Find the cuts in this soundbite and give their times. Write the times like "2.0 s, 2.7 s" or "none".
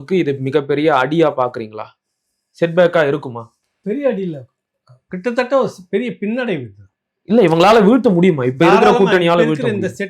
none